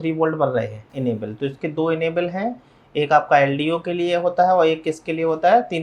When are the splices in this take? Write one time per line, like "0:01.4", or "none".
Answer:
0:00.9